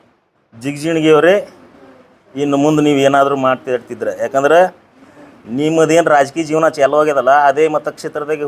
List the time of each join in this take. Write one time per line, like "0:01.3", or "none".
0:05.6